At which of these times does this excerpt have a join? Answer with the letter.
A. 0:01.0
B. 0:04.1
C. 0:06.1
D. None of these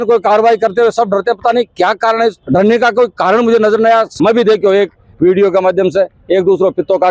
B